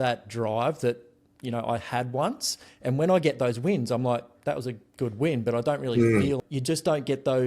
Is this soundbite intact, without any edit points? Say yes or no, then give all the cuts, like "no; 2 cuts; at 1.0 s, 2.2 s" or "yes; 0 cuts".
no; 1 cut; at 6.4 s